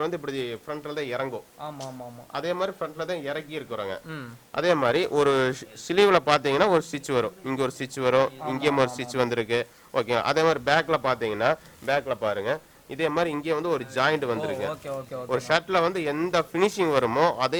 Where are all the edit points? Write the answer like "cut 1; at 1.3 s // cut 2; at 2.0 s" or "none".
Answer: none